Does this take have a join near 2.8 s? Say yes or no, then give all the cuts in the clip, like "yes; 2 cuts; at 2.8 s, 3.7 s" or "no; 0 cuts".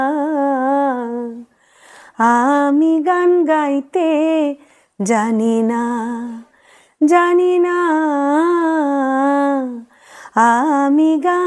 no; 0 cuts